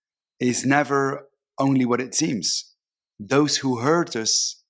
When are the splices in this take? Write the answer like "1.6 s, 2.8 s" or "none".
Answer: none